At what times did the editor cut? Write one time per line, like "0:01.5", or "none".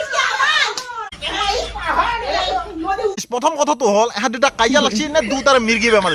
0:01.0